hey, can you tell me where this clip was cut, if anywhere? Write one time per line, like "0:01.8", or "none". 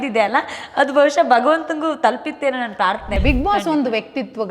0:03.1